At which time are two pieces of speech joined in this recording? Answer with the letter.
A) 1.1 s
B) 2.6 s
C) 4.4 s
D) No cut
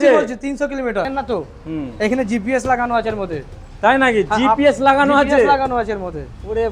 A